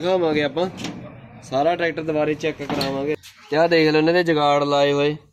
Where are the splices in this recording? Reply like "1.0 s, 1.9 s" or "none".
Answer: 3.2 s